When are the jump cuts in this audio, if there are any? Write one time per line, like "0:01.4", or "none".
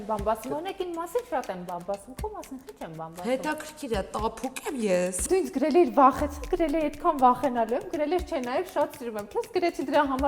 0:05.2

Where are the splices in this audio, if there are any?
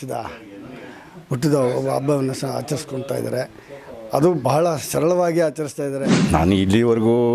0:06.0

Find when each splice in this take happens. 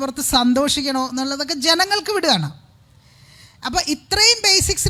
none

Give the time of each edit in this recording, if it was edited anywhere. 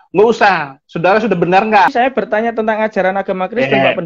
0:01.9

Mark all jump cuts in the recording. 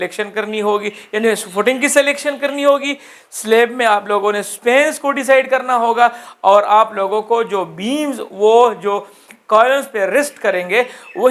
none

